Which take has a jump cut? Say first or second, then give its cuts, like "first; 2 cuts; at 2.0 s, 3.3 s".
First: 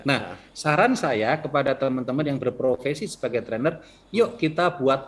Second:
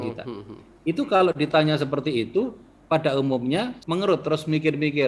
second; 1 cut; at 3.8 s